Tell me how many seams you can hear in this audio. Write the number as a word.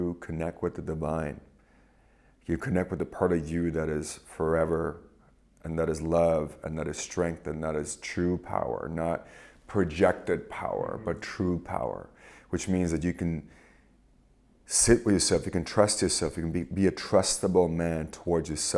zero